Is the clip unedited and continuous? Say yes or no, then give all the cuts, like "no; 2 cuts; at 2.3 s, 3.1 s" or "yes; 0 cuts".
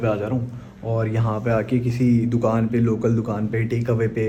yes; 0 cuts